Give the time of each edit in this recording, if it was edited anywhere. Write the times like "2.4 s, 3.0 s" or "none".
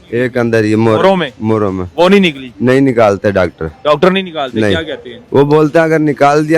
none